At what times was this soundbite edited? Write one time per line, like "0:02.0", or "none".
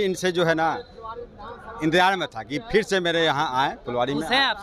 none

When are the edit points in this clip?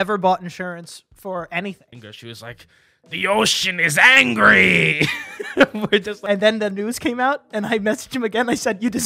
0:01.9
0:06.1

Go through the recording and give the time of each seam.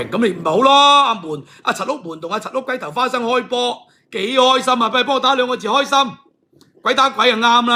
none

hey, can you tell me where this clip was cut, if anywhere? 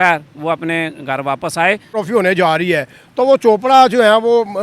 0:01.9

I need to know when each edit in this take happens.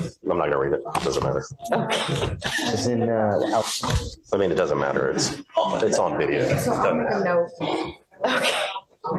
none

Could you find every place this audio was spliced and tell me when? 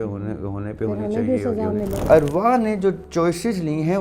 0:02.0
0:03.0

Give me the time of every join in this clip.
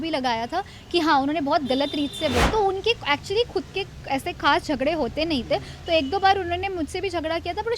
0:02.4

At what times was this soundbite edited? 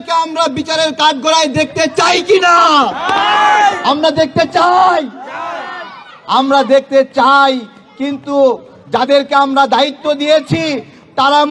none

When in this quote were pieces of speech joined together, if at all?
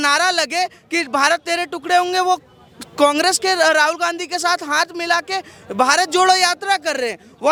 none

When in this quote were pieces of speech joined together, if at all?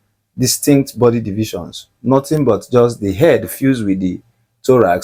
none

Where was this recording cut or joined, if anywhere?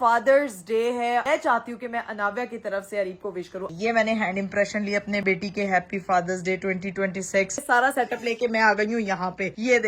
0:01.2
0:03.7
0:05.2
0:07.6

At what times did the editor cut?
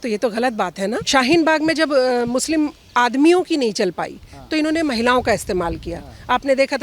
0:01.0

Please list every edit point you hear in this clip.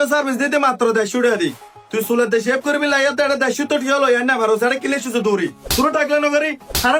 none

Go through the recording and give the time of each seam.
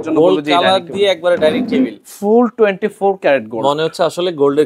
none

